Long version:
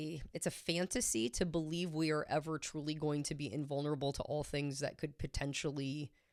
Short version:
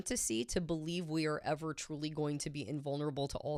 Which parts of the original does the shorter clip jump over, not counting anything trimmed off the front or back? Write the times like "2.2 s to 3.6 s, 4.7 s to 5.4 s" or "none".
none